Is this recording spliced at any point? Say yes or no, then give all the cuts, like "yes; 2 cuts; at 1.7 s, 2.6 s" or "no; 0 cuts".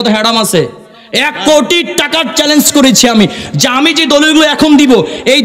no; 0 cuts